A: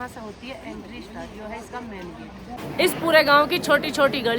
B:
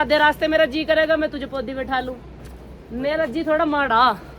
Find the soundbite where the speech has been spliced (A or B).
A